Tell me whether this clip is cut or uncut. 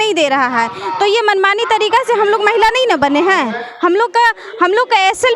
uncut